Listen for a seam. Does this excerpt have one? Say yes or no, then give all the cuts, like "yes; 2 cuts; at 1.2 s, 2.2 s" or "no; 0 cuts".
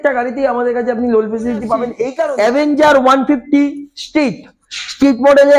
yes; 1 cut; at 2.2 s